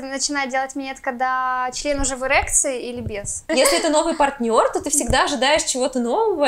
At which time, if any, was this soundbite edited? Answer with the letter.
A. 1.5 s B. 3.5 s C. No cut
B